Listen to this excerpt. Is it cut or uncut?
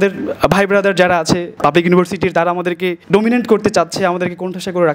uncut